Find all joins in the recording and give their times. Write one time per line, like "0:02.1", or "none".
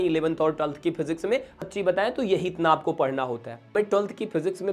0:01.6
0:03.6